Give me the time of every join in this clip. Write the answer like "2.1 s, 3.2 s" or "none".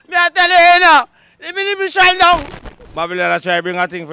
2.5 s

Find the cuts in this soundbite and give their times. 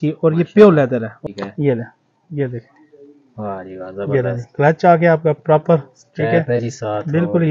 1.2 s

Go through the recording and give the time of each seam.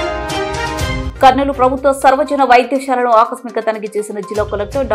1.1 s

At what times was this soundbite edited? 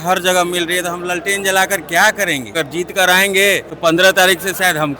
2.5 s, 3.7 s

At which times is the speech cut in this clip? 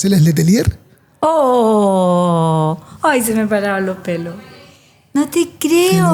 none

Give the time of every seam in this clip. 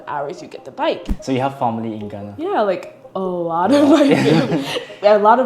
1.1 s

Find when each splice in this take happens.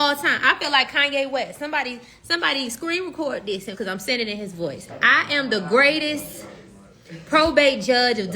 3.7 s, 4.9 s

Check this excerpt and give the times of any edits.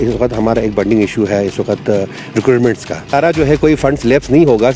3.1 s

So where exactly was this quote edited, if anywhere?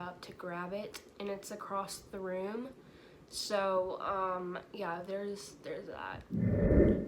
6.1 s

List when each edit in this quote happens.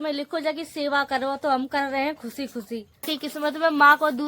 3.1 s

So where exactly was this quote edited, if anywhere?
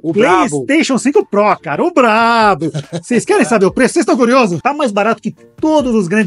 4.6 s

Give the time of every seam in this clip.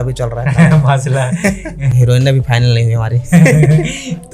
1.8 s

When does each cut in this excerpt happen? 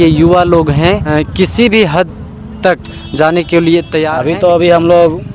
1.1 s, 4.2 s

